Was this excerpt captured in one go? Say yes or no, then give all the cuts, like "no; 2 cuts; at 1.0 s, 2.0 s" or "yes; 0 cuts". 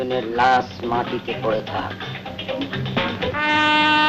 yes; 0 cuts